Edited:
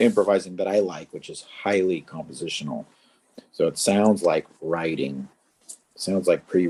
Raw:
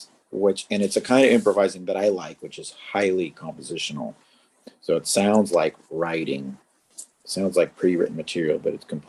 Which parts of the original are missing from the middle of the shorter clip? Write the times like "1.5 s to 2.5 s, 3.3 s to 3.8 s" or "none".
none